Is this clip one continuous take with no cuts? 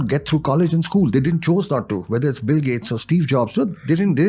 yes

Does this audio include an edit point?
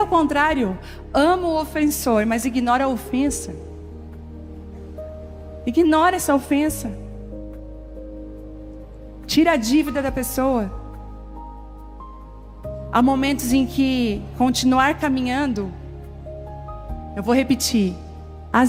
no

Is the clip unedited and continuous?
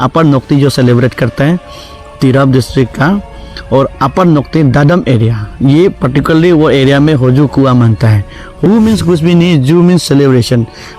no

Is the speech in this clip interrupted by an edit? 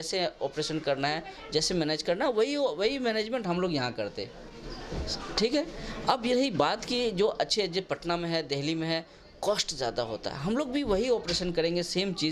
no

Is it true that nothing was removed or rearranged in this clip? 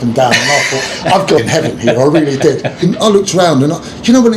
no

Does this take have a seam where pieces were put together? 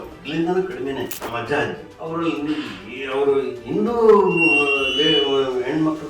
yes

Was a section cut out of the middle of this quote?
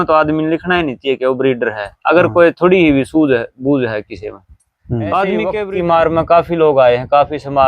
yes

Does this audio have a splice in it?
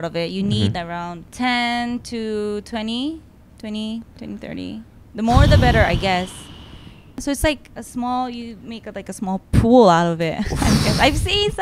yes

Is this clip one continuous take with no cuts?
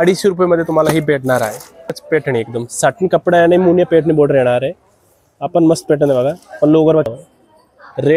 no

